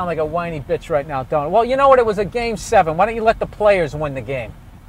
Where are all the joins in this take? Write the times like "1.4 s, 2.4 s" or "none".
none